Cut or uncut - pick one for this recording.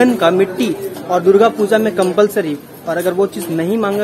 uncut